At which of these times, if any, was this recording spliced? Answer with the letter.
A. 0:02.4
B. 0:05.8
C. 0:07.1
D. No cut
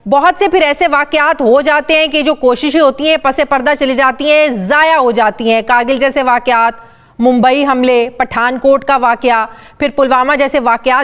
D